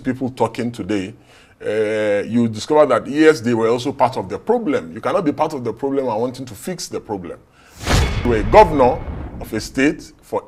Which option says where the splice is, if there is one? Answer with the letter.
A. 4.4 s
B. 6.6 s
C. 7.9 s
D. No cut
C